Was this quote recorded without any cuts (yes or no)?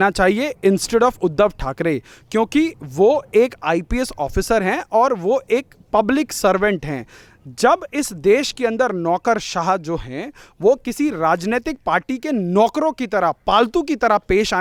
yes